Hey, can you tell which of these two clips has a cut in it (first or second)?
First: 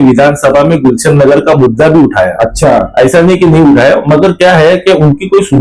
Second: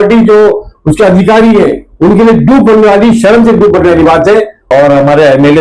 second